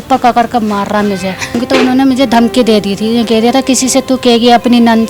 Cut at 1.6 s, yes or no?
yes